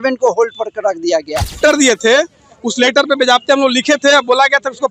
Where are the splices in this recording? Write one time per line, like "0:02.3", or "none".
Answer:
0:01.6